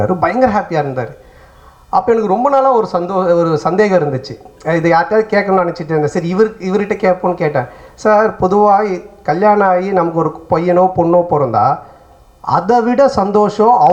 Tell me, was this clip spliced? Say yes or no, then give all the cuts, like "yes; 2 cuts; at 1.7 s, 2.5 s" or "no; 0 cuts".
no; 0 cuts